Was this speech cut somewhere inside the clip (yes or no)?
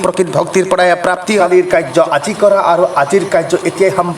yes